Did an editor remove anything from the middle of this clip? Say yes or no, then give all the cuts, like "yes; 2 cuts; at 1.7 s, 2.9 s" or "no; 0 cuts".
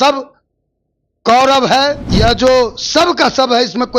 yes; 1 cut; at 2.0 s